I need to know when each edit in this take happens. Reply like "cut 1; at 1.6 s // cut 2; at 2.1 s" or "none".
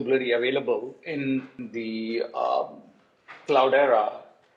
cut 1; at 1.6 s